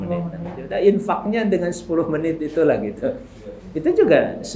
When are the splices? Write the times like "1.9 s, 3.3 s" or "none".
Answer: none